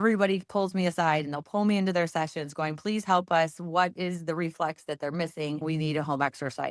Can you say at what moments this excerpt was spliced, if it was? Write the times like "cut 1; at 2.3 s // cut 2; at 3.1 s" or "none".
cut 1; at 5.6 s